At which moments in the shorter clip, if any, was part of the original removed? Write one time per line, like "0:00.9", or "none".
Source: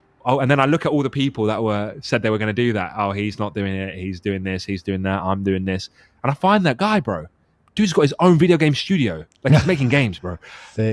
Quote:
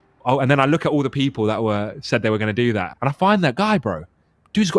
0:02.9